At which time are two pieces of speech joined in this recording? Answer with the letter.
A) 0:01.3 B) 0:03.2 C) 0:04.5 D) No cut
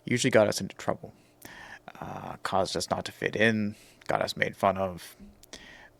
D